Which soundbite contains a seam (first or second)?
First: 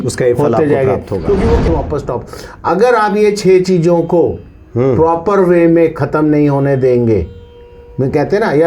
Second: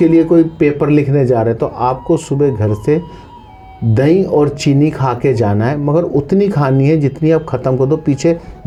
first